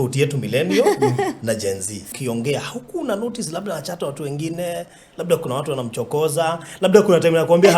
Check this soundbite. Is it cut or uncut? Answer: cut